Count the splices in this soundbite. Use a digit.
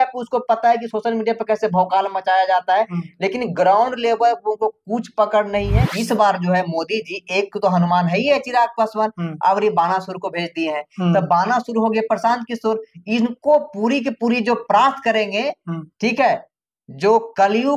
1